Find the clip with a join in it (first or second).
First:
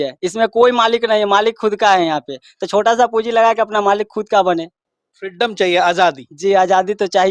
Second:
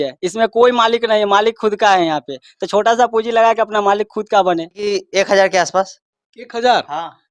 second